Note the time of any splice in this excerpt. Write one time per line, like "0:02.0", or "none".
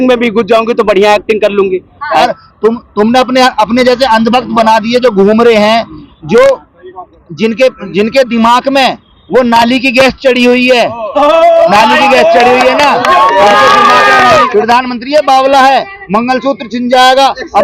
0:02.5
0:14.5